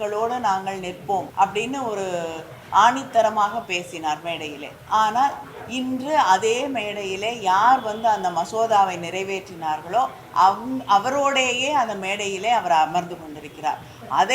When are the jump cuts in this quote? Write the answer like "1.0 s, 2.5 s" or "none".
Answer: 1.3 s